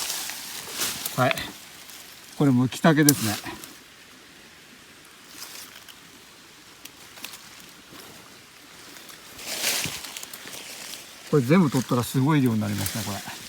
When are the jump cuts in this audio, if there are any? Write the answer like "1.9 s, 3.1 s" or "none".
none

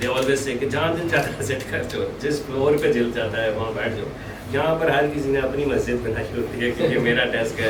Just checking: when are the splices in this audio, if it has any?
none

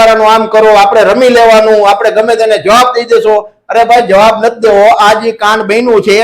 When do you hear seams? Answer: 5.2 s

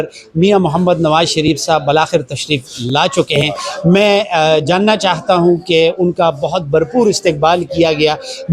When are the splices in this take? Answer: none

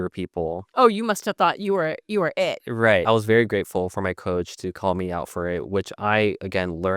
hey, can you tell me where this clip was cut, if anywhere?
3.0 s

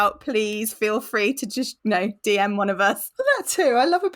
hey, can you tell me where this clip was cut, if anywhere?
1.7 s, 3.1 s

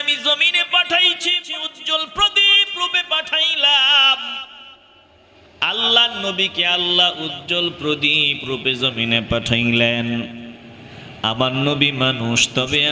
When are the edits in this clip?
1.4 s

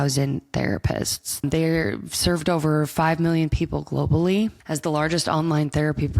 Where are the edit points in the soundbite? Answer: 1.3 s, 4.6 s

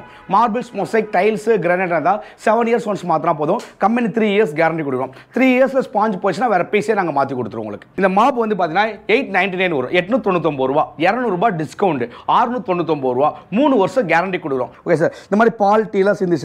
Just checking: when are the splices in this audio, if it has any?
7.8 s, 14.7 s

